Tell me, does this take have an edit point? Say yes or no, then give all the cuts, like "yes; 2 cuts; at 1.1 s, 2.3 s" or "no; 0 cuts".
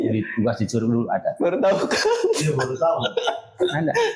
no; 0 cuts